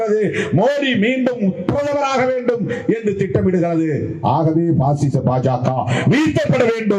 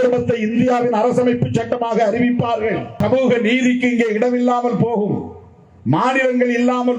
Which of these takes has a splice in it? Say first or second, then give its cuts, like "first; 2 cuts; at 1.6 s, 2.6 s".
second; 1 cut; at 2.9 s